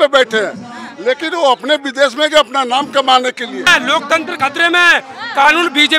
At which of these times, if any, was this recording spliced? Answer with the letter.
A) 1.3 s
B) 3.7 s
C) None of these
B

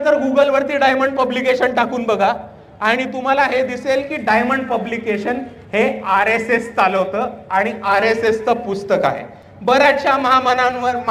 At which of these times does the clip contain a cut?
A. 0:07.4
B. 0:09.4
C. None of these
C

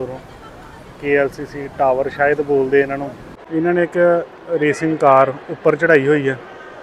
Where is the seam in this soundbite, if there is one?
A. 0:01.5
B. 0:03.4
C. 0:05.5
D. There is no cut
B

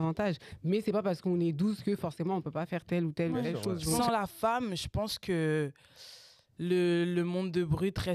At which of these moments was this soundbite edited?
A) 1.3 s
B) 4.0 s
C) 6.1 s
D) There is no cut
B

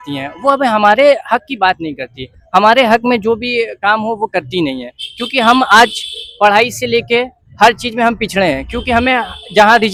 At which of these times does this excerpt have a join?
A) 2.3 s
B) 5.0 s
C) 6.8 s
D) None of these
D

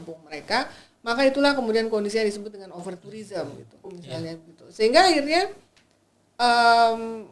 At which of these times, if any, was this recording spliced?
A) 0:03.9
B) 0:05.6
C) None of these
A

